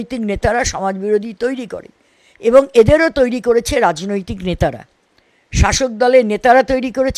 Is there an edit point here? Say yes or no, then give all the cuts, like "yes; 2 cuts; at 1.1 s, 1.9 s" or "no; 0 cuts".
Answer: no; 0 cuts